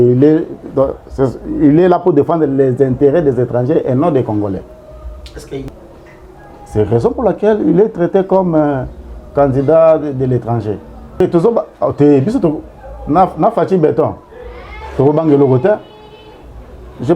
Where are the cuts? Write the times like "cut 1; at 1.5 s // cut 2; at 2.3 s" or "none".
cut 1; at 5.7 s // cut 2; at 11.2 s